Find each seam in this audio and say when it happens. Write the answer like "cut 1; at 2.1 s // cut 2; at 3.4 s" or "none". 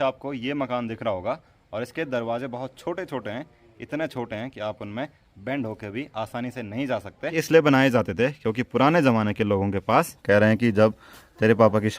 cut 1; at 7.3 s // cut 2; at 10.2 s